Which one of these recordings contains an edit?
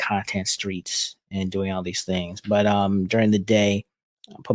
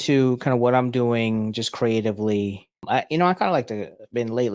second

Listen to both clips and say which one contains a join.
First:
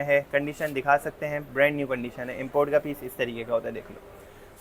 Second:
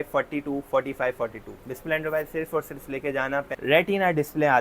second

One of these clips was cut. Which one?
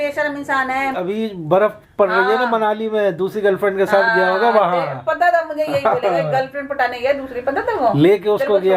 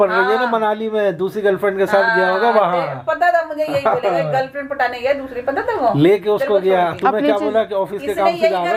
first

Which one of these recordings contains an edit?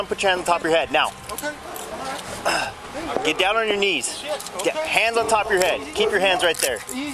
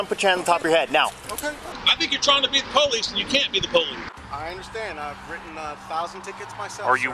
second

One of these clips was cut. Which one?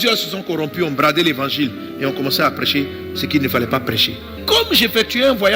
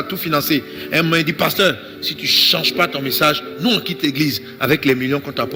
first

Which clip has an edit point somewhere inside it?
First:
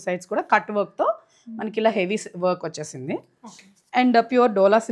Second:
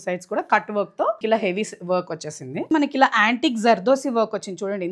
second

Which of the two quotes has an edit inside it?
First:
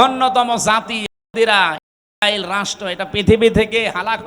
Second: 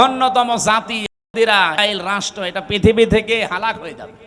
second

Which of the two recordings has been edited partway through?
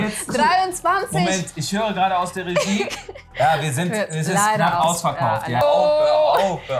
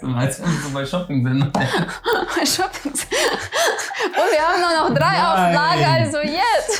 first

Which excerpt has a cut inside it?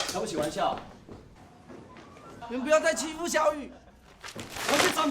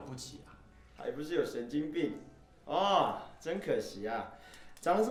first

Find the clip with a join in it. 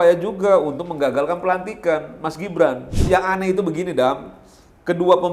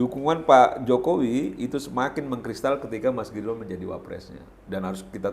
first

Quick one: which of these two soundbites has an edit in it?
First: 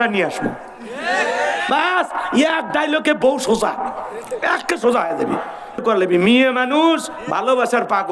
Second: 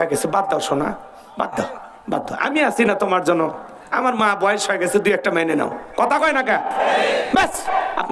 first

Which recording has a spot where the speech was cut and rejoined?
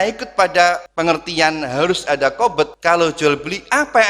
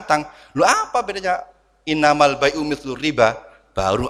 first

